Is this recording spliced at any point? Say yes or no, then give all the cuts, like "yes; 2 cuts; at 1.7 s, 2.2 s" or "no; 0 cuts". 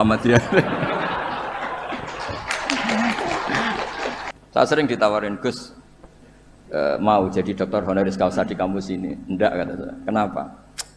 yes; 1 cut; at 4.2 s